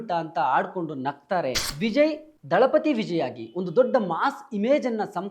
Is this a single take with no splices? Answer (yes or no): no